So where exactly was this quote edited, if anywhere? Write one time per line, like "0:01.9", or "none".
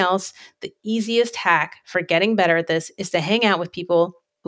none